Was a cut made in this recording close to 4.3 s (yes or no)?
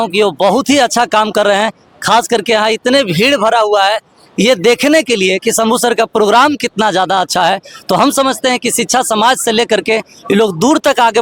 no